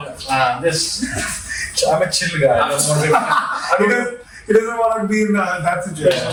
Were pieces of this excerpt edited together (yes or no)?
no